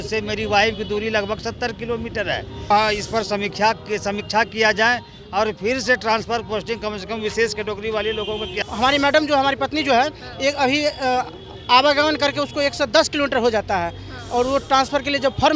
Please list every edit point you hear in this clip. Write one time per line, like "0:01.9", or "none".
0:02.7
0:08.6